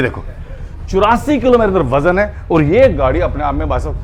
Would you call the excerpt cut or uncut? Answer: uncut